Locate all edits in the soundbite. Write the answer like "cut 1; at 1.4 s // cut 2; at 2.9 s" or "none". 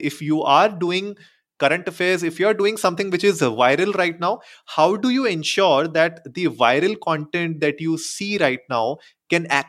none